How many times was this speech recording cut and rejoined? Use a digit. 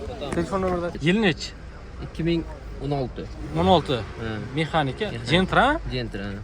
1